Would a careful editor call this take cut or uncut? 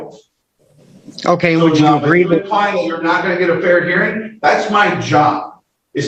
uncut